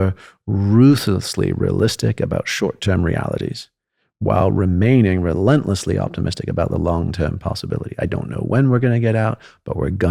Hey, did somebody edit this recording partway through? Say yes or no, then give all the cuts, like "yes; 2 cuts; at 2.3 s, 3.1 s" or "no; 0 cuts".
no; 0 cuts